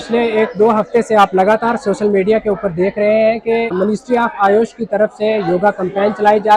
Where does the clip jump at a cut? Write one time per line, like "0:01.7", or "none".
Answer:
0:03.7